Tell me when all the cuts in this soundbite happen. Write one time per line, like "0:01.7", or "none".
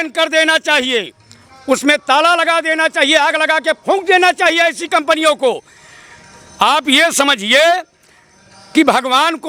none

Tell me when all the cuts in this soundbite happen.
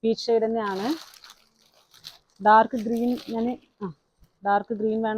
none

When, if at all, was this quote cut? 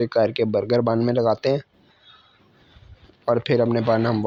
none

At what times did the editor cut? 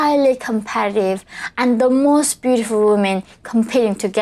none

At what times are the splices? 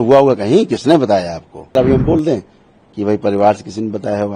0:01.8

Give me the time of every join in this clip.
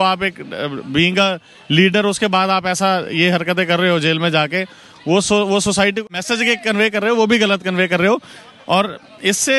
0:06.0

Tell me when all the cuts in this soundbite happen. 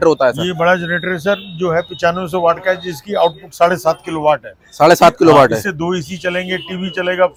none

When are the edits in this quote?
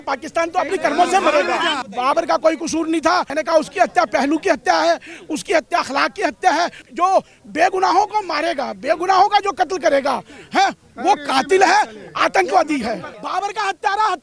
0:01.8
0:03.3
0:06.8
0:13.2

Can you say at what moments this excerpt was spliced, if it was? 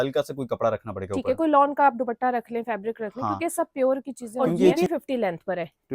0:04.7

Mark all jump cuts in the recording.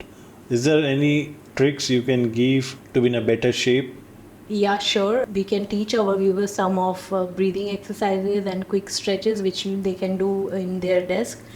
0:02.8

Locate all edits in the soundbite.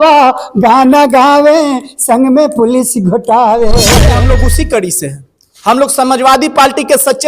0:04.1

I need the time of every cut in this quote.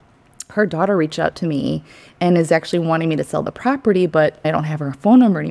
0:04.4

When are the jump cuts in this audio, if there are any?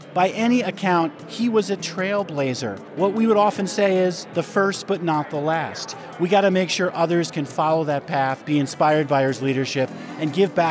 0:02.8
0:08.1

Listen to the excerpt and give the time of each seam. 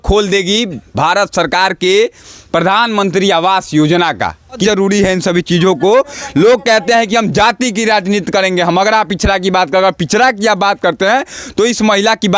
0:04.6

